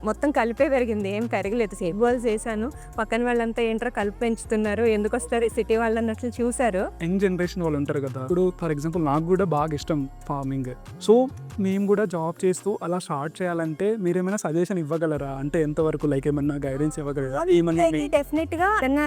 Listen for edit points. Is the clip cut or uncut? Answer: cut